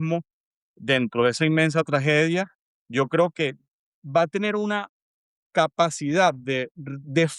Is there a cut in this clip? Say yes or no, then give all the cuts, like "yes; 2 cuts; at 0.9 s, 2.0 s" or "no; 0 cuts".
no; 0 cuts